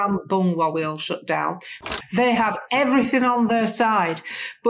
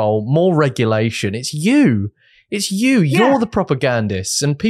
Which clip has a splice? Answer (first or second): first